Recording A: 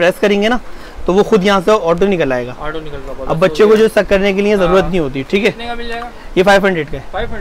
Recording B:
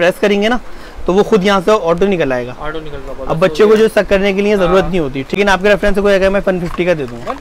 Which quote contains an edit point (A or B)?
B